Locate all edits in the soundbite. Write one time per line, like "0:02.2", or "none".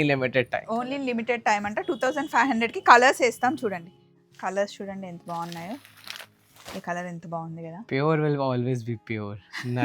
0:03.8

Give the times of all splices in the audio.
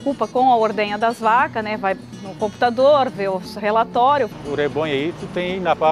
0:04.4

